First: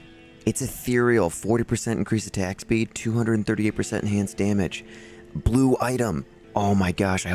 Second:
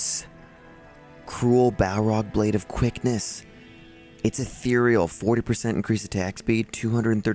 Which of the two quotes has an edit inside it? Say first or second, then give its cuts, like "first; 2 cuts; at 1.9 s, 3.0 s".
first; 1 cut; at 6.3 s